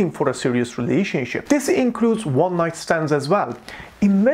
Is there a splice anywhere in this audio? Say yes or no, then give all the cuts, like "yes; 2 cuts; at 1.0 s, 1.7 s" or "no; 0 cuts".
no; 0 cuts